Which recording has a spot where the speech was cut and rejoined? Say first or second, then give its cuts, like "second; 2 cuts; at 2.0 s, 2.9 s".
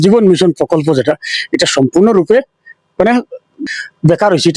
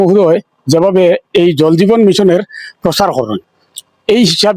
first; 1 cut; at 3.6 s